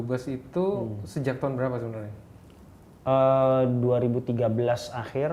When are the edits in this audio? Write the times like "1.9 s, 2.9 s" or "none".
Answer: none